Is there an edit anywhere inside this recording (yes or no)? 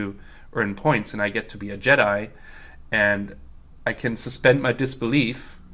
no